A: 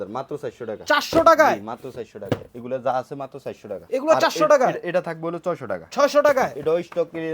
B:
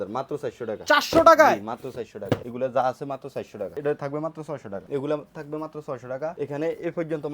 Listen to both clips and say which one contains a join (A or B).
B